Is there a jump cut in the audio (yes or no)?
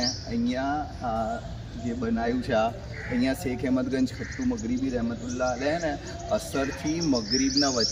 no